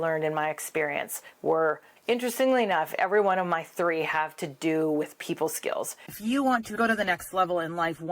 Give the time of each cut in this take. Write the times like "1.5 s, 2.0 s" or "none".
1.9 s, 6.0 s